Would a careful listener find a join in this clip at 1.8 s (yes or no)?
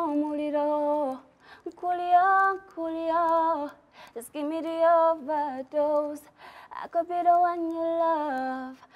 no